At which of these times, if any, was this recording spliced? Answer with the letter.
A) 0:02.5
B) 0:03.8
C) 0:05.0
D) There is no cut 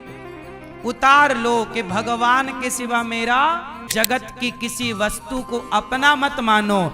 B